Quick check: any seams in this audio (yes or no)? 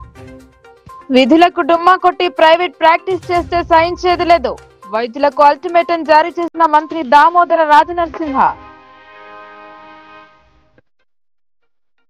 no